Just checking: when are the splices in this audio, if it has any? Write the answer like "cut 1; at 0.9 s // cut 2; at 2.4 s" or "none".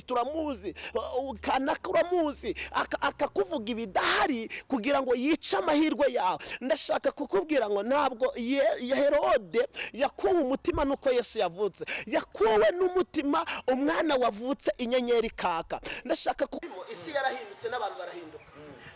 cut 1; at 16.6 s